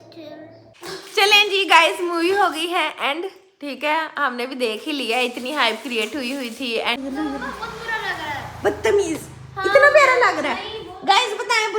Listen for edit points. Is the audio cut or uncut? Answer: cut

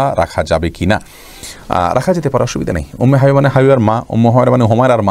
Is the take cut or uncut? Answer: uncut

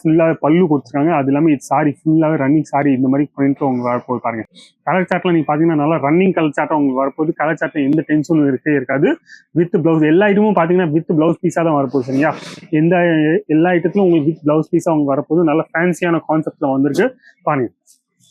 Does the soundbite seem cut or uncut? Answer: uncut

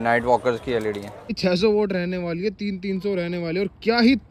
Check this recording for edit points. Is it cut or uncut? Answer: cut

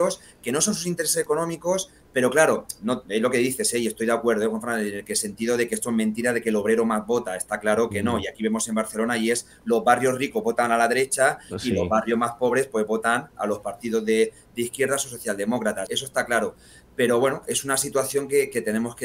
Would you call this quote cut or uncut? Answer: cut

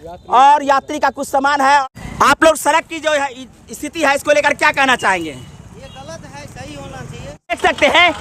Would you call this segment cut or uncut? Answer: cut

